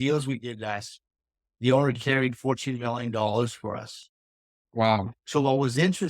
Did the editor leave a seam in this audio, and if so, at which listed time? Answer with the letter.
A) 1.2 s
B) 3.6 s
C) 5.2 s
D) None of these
C